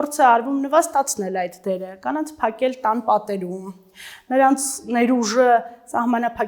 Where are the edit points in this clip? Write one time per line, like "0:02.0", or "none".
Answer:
none